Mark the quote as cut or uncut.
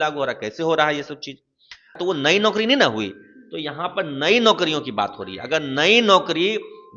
cut